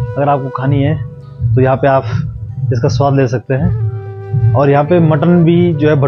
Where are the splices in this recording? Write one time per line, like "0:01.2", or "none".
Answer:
none